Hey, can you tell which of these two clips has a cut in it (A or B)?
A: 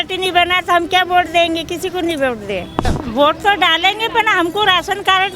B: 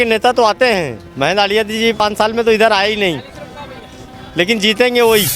A